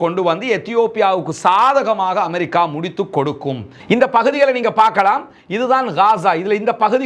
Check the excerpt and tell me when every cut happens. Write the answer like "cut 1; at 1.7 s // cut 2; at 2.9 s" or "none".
cut 1; at 3.7 s